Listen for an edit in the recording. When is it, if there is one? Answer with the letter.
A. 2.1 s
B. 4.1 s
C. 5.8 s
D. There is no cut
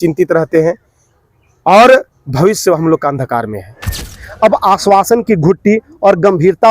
B